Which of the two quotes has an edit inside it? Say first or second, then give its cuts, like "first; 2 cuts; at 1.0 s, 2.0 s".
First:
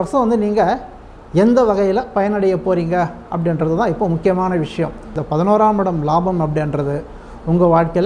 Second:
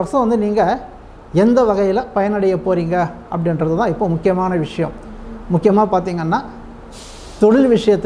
first; 1 cut; at 5.1 s